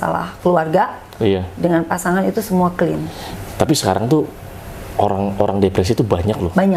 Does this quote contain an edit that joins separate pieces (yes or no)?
no